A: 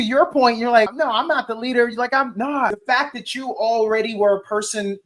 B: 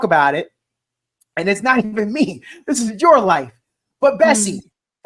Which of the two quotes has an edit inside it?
A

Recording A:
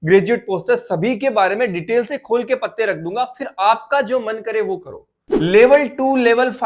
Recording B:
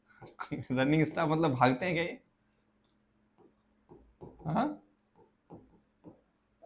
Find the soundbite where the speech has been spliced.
A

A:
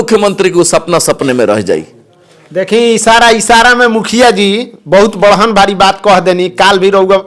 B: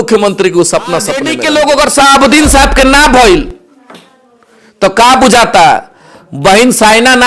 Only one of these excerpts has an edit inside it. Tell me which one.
B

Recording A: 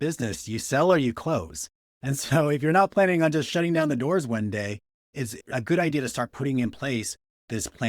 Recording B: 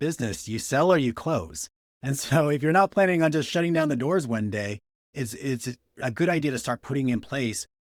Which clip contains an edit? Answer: A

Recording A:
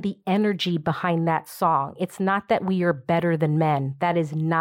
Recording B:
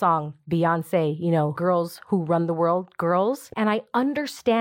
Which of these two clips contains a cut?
B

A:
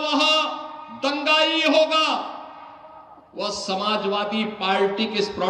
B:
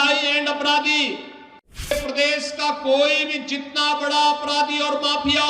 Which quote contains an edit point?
B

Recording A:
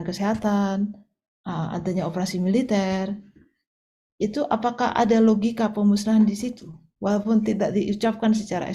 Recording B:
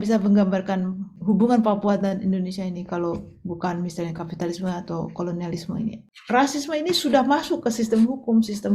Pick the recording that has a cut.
B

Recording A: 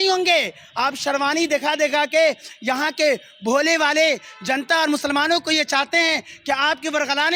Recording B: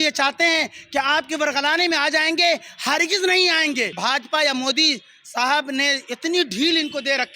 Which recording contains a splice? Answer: B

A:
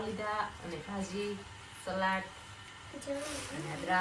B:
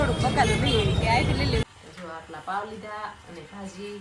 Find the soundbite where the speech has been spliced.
B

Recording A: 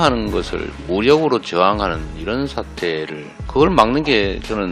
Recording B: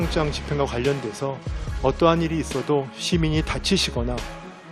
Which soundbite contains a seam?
A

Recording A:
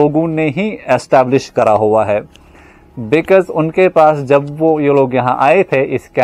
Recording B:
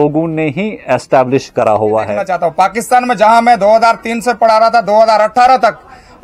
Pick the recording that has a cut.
B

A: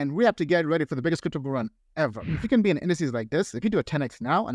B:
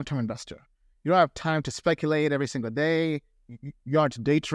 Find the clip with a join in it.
A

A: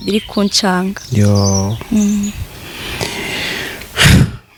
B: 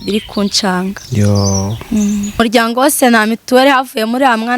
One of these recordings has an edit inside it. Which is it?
B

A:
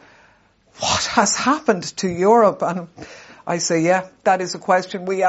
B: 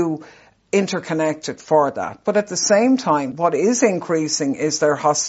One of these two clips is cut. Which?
B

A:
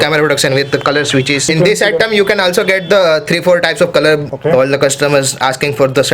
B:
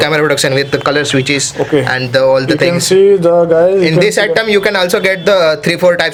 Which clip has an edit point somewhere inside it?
A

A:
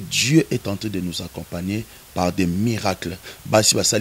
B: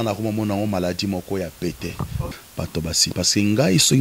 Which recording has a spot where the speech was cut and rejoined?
B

